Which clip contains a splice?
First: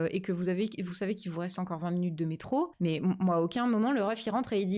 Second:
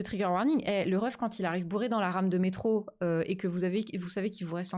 first; 1 cut; at 2.7 s

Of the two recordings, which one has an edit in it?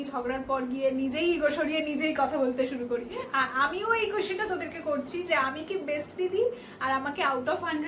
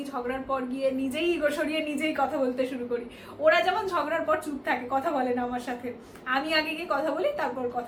first; 1 cut; at 3.2 s

